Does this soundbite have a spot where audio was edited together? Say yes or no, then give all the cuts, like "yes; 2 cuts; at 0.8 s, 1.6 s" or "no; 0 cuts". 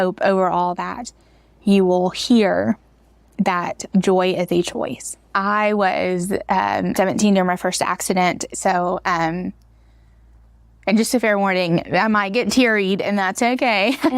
yes; 3 cuts; at 5.3 s, 6.9 s, 8.5 s